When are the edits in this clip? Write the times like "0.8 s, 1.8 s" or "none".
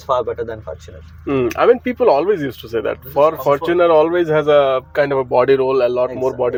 none

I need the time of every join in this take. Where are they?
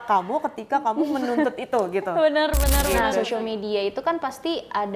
3.1 s

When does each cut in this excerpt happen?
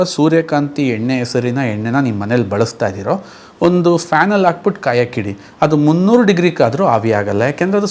none

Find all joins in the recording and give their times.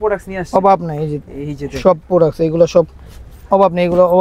none

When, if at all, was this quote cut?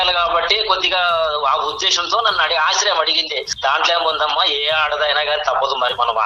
3.5 s

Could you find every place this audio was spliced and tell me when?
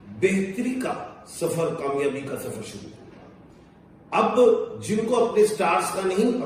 none

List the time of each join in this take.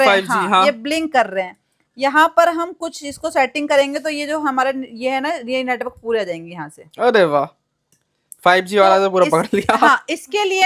none

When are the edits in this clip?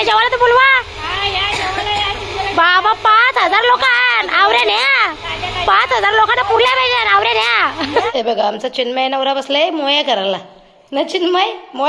8.1 s

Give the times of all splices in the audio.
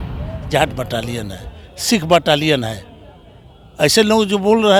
none

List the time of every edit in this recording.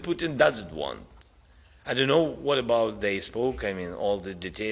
none

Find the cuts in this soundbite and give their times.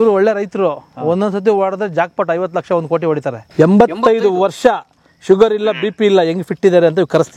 3.4 s

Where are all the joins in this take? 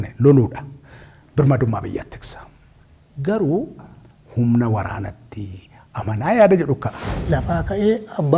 3.8 s, 7.1 s

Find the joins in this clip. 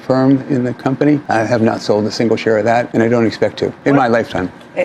1.2 s, 2.9 s, 3.8 s

